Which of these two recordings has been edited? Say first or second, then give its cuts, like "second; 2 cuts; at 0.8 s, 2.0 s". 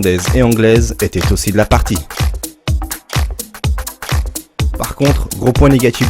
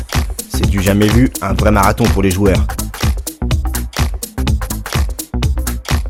first; 1 cut; at 3.0 s